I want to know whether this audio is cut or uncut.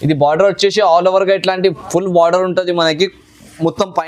uncut